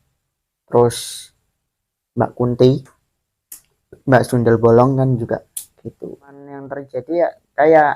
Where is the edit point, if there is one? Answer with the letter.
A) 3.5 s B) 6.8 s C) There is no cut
B